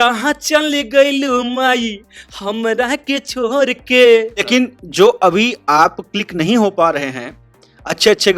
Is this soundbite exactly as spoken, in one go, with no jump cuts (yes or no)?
no